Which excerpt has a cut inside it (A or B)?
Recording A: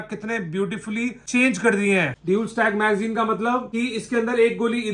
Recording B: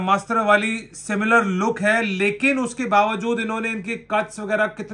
A